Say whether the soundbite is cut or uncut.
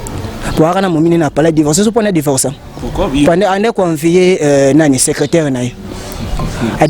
uncut